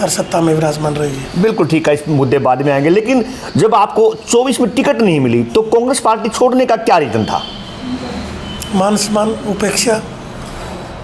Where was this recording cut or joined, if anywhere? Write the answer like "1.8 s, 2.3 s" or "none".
none